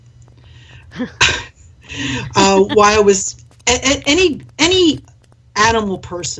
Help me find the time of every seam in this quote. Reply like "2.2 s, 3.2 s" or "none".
none